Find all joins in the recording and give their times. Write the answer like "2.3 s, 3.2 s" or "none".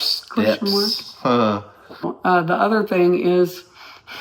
2.0 s

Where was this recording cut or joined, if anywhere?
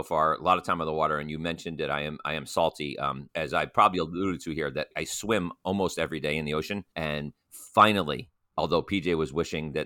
3.2 s, 4.9 s, 6.8 s

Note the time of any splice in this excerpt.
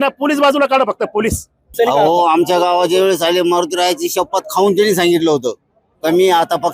1.7 s

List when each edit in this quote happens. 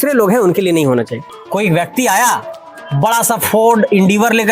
1.2 s

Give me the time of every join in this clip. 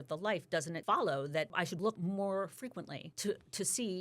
0.8 s, 1.9 s, 3.0 s

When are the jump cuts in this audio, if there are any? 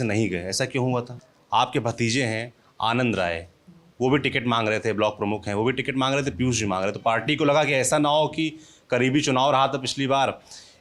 1.2 s

